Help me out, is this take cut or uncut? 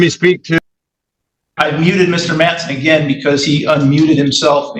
uncut